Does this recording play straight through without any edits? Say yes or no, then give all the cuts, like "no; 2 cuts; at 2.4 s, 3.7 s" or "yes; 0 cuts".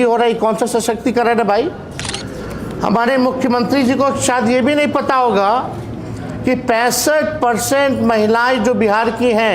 yes; 0 cuts